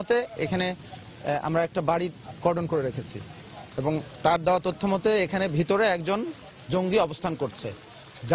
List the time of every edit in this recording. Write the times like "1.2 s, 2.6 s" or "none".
none